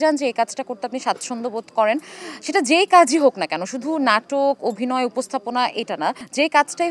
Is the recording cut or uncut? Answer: uncut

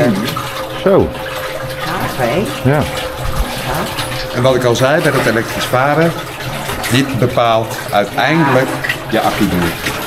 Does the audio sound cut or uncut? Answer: uncut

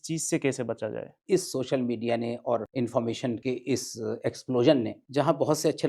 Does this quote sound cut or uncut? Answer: cut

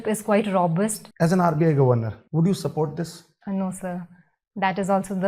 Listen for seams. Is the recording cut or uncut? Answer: cut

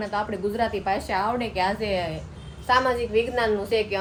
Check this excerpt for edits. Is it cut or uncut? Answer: uncut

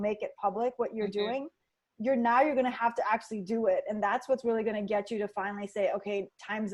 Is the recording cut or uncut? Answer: uncut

